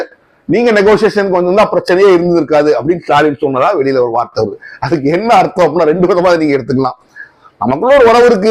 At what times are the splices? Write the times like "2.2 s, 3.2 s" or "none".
none